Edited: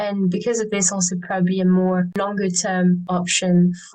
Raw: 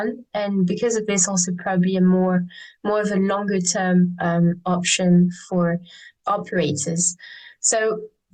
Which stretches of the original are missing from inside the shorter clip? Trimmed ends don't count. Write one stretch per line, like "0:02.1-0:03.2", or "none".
0:02.5-0:03.3
0:04.1-0:04.6